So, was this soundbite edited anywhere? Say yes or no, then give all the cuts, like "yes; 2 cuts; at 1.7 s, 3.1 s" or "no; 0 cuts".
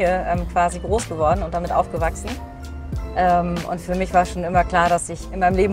no; 0 cuts